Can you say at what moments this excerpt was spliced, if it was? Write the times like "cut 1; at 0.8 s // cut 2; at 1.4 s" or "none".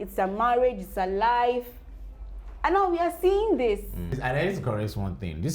cut 1; at 4.2 s